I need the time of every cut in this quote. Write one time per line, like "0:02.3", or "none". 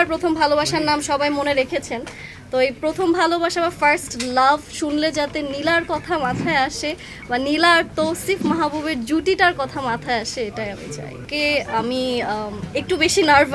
0:11.2